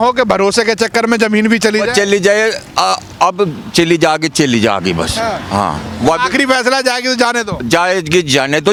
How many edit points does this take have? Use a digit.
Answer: 0